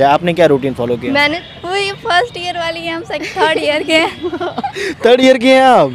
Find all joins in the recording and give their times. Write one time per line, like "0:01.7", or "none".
0:01.4